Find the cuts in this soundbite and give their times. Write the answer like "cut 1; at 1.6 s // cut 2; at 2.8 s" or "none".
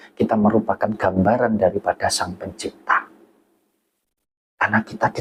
none